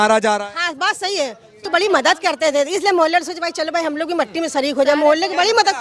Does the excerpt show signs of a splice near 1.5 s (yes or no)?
yes